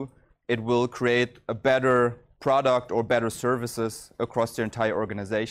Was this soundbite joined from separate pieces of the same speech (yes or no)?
yes